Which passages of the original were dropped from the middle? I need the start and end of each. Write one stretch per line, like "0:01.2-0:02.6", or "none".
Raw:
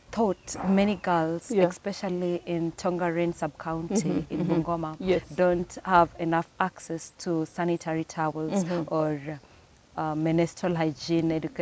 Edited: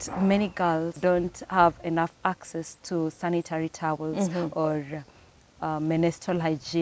0:01.4-0:05.3